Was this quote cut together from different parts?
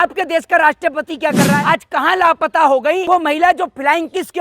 yes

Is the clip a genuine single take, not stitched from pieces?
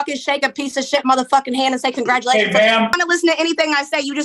no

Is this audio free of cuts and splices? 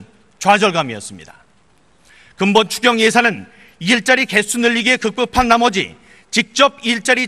no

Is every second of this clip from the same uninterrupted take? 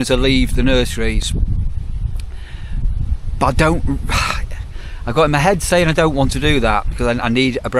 yes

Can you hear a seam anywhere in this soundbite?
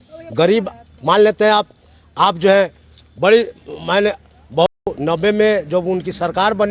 yes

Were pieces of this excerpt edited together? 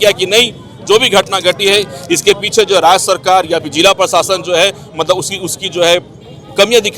no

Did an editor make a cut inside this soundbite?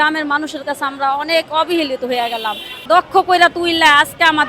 yes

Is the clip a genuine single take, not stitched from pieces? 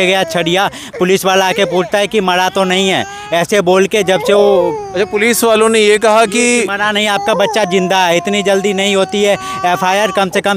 yes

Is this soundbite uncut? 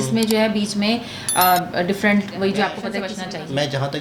no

